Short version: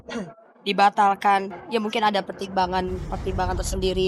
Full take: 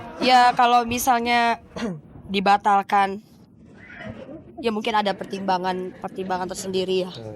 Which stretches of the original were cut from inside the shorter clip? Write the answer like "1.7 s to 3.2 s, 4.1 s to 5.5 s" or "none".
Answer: 3.2 s to 4.5 s